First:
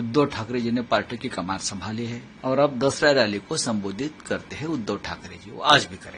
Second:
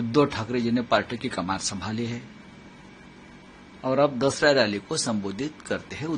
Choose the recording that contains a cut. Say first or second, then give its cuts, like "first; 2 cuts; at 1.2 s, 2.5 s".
first; 1 cut; at 2.3 s